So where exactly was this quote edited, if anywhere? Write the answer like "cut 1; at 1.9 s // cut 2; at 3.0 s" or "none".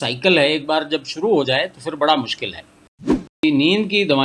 cut 1; at 3.2 s

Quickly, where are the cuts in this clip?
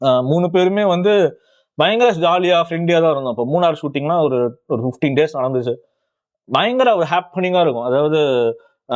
none

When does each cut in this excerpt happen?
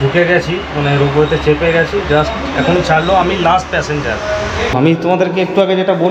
cut 1; at 4.7 s

